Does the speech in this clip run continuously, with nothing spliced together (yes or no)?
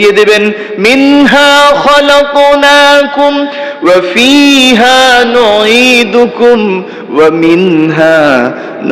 yes